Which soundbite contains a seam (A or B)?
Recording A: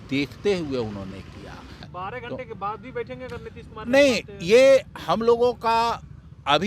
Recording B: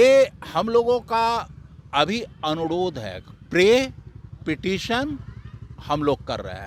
A